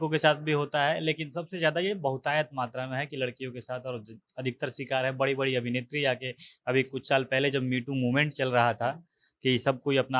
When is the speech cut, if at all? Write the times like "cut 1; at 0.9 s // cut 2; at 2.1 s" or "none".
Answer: none